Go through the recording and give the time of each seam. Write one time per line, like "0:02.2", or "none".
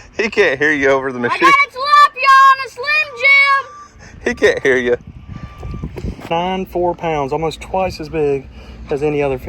0:06.2